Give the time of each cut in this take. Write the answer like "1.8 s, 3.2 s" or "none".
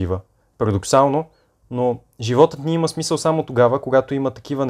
none